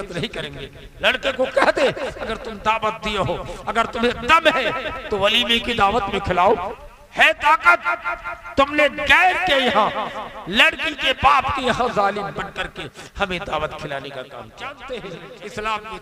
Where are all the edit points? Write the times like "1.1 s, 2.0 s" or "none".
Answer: 6.8 s, 14.8 s